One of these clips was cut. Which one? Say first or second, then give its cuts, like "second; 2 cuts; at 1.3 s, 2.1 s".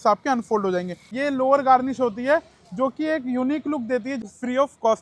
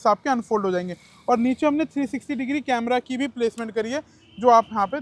first; 2 cuts; at 1.1 s, 4.1 s